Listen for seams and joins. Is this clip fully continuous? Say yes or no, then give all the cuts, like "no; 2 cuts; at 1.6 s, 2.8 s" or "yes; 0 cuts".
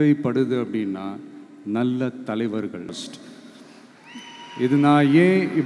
no; 1 cut; at 2.9 s